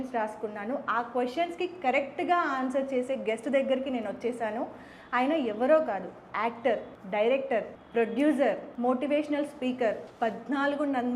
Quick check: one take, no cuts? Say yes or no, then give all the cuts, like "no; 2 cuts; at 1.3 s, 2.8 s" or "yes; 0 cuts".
no; 4 cuts; at 6.9 s, 7.8 s, 8.7 s, 10.1 s